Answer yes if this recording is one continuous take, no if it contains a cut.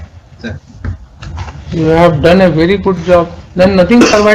yes